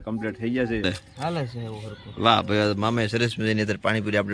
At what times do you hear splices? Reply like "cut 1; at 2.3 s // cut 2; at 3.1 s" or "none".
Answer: cut 1; at 1.0 s